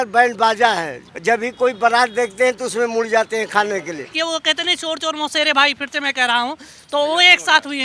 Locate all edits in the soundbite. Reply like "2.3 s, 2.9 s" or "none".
1.0 s, 4.1 s